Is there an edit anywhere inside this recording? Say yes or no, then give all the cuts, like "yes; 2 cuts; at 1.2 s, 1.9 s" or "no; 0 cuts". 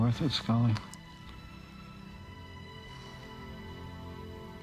yes; 1 cut; at 3.0 s